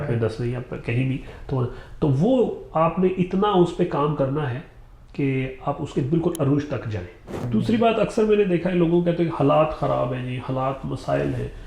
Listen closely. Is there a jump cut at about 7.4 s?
yes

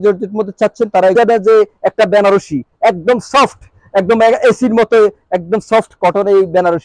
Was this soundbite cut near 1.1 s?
yes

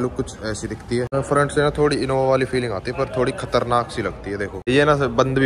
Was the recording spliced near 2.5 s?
no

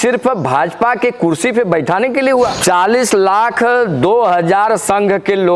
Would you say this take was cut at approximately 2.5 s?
yes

